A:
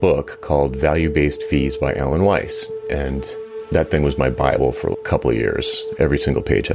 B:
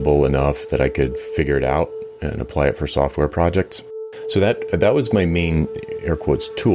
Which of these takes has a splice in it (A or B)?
A